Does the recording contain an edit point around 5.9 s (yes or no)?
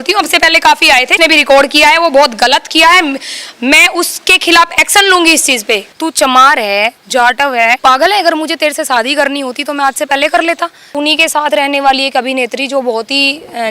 yes